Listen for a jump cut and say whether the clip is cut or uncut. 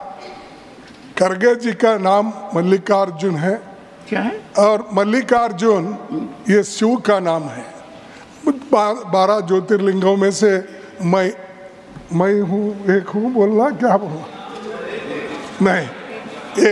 uncut